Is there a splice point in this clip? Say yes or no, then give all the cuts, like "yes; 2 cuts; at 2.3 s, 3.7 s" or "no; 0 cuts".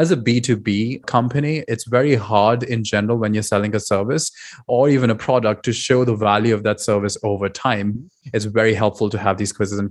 yes; 3 cuts; at 1.0 s, 4.7 s, 7.9 s